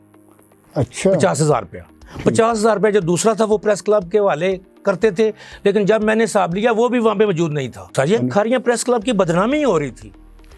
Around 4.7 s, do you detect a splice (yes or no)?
no